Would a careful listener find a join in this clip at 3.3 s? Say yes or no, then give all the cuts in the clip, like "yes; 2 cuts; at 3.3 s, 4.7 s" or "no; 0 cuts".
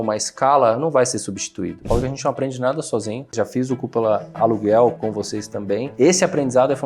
yes; 4 cuts; at 1.8 s, 3.3 s, 4.4 s, 5.0 s